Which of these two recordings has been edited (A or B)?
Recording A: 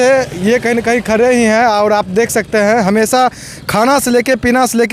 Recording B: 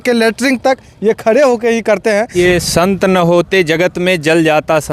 B